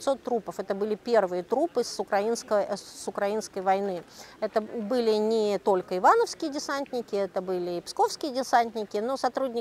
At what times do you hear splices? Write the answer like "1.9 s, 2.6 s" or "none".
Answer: none